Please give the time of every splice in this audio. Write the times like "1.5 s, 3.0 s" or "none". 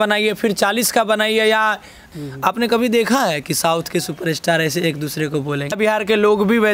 2.0 s, 5.7 s